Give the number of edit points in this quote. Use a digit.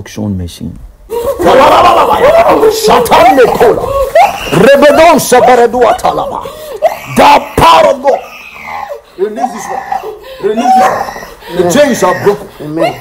1